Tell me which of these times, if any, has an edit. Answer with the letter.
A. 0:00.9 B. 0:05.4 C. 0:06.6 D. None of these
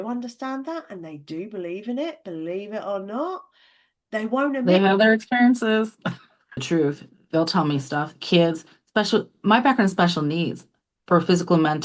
C